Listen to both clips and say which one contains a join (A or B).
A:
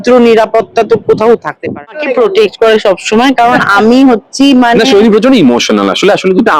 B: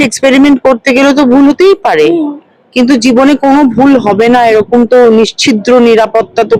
A